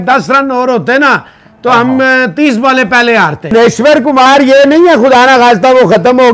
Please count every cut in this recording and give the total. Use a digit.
1